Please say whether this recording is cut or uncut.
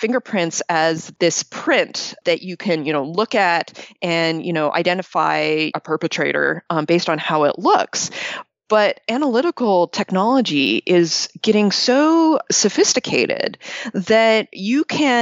cut